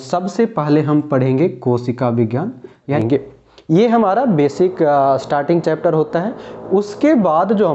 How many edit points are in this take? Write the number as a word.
one